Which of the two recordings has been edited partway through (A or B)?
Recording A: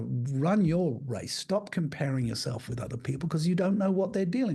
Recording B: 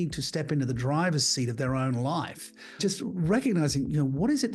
B